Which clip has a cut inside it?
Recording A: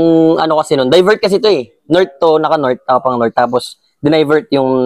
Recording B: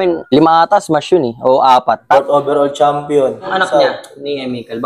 B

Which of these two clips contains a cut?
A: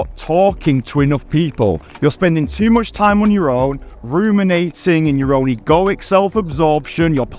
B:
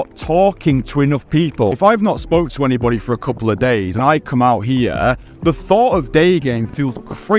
B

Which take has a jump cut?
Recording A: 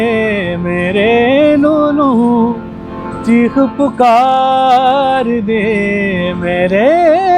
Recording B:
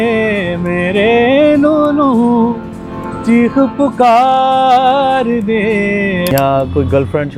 B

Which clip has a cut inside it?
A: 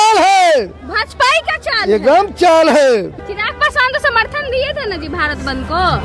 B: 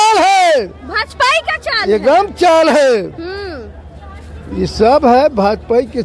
A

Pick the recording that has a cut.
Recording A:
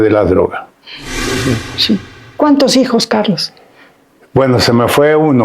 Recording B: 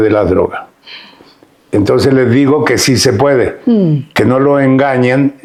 A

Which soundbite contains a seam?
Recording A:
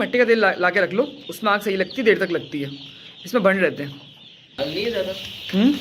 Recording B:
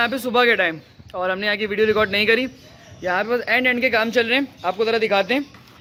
A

